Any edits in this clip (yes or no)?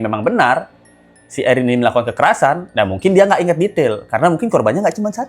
no